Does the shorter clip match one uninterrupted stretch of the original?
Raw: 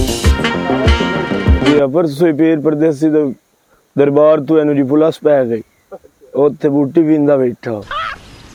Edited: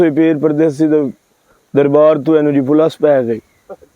yes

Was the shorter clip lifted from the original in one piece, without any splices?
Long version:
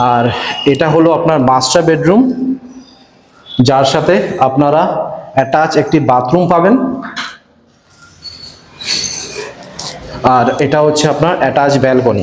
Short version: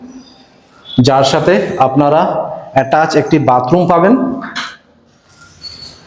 yes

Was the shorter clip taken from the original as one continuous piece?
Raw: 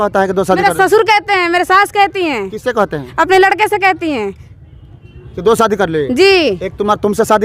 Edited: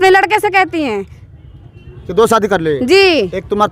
yes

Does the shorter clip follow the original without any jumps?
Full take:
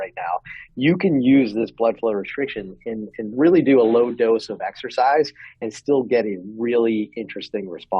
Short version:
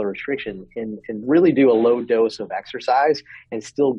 yes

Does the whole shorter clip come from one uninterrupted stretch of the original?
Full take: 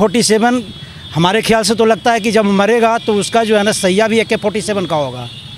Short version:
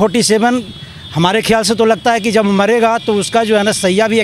yes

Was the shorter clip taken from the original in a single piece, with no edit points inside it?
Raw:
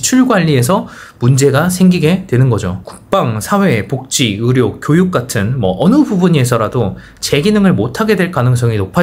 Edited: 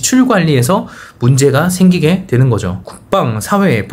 yes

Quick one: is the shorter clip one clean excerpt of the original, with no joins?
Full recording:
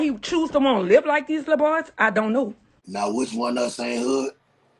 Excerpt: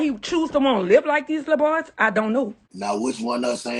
no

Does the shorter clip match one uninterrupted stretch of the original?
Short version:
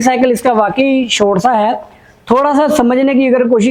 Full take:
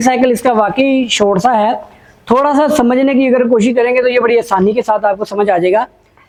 yes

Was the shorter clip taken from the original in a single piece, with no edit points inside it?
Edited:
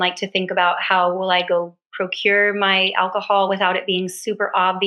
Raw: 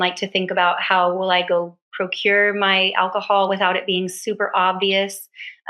yes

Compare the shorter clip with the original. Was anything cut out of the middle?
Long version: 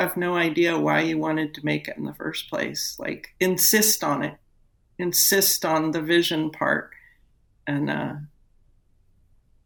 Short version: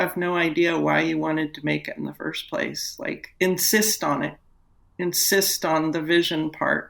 no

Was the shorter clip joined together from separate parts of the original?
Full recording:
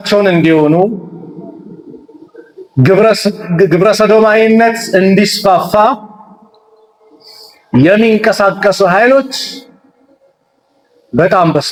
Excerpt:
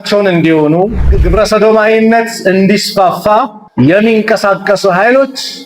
yes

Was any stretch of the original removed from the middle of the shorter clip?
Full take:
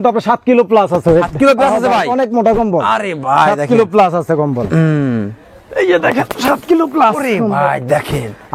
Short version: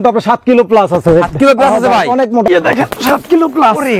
yes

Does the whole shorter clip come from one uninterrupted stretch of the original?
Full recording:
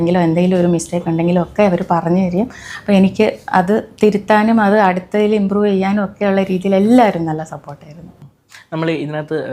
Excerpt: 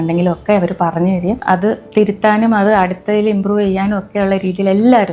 no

